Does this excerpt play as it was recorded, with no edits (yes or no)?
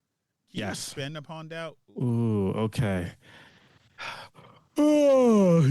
no